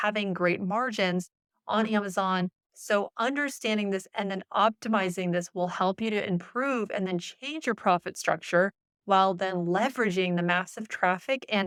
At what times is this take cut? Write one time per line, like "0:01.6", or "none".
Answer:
none